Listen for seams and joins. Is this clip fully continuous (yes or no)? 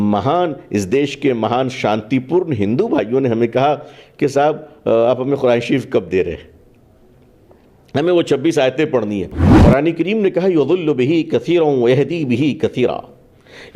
no